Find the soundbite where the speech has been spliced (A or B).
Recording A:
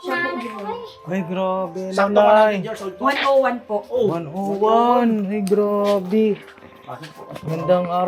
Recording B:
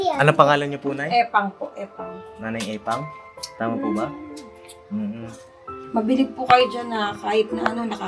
B